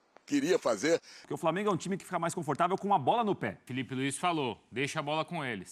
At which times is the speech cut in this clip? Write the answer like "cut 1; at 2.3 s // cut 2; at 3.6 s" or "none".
cut 1; at 1.2 s // cut 2; at 3.7 s